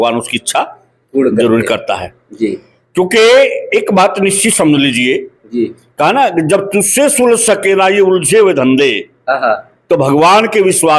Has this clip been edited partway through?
no; 0 cuts

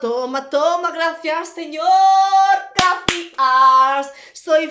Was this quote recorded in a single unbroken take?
yes; 0 cuts

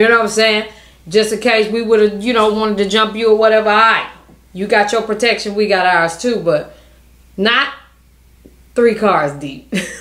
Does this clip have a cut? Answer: no; 0 cuts

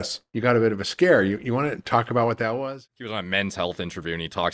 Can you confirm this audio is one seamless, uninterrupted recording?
no; 1 cut; at 2.7 s

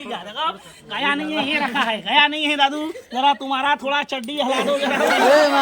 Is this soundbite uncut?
yes; 0 cuts

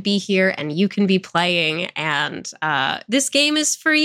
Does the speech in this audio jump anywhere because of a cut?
no; 0 cuts

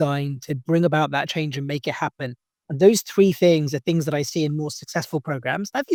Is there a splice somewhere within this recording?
no; 0 cuts

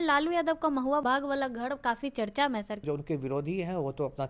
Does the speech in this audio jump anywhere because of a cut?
yes; 2 cuts; at 1.0 s, 2.8 s

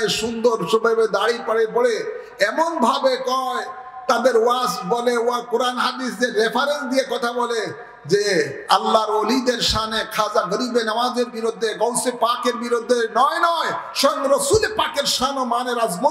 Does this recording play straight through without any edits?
yes; 0 cuts

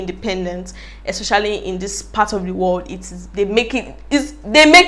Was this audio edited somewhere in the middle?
no; 0 cuts

